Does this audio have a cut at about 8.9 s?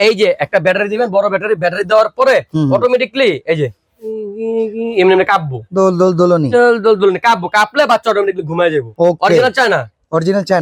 yes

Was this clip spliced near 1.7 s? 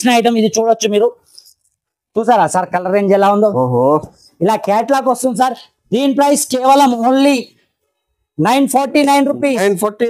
no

